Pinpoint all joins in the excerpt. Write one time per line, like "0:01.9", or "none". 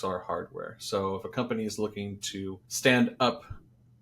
0:02.6